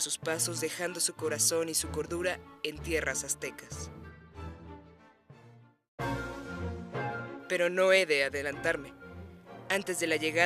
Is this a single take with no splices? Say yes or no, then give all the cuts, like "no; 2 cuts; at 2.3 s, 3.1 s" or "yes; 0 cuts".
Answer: no; 1 cut; at 2.5 s